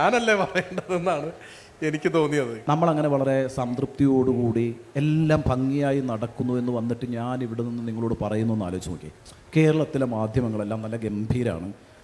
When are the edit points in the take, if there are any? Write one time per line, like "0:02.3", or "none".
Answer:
0:02.6